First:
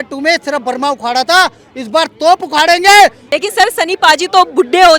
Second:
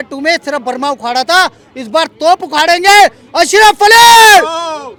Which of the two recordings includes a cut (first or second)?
first